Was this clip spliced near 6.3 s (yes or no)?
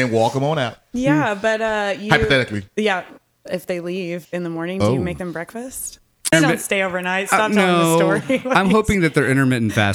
yes